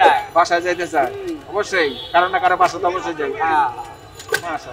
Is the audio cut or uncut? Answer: uncut